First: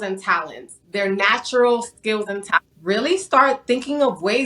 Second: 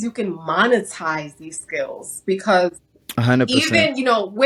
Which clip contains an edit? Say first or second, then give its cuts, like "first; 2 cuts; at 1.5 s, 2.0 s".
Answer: first; 1 cut; at 2.7 s